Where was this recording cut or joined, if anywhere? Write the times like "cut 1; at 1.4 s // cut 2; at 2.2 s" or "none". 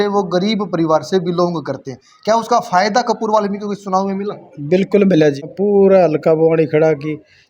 cut 1; at 5.4 s

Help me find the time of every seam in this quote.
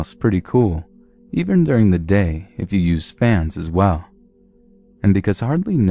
cut 1; at 4.8 s

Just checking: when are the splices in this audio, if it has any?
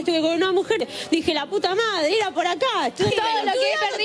cut 1; at 3.1 s

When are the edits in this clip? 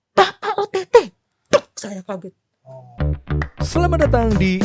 cut 1; at 2.8 s

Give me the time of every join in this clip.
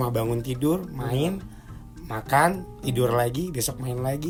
none

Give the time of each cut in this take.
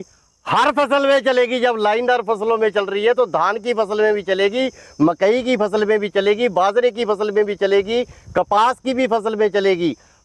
none

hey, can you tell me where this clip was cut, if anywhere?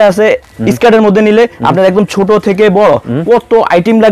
none

